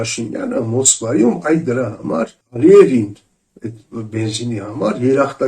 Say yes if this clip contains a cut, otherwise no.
yes